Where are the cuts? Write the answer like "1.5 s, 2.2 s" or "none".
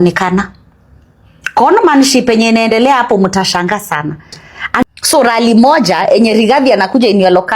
4.8 s